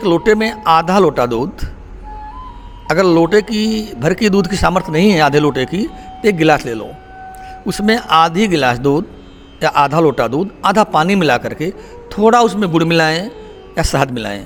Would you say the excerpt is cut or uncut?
uncut